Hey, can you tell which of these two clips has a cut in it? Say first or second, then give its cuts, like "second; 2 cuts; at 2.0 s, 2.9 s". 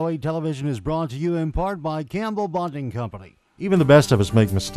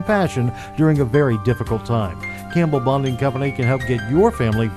first; 1 cut; at 3.7 s